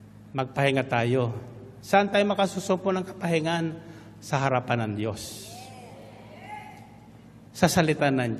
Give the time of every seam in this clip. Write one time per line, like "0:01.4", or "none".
none